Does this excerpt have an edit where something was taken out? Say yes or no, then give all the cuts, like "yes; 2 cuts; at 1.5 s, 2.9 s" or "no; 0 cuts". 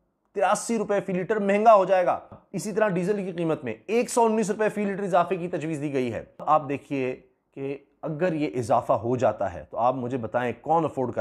yes; 2 cuts; at 2.5 s, 6.3 s